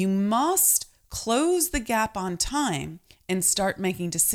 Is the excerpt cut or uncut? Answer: uncut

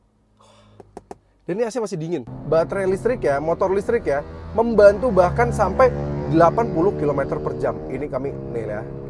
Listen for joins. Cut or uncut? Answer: cut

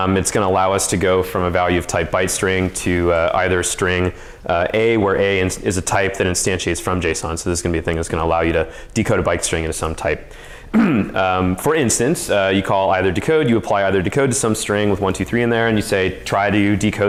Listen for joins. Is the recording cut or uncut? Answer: uncut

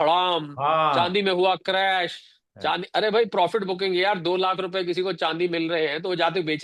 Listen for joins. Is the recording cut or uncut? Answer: uncut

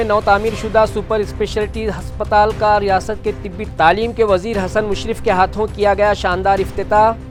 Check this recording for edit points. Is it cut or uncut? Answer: uncut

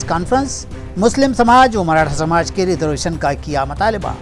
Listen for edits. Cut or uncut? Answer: uncut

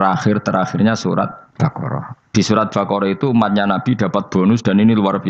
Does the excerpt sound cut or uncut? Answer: cut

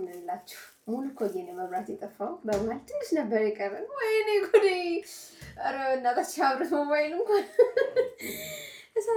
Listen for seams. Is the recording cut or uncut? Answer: uncut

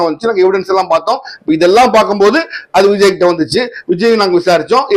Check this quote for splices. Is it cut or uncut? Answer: uncut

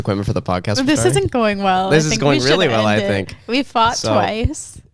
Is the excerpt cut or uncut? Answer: uncut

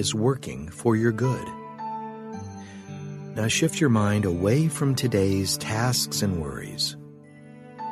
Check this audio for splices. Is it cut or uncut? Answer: uncut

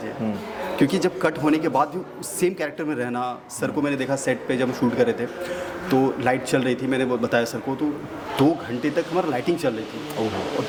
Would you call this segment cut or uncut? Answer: uncut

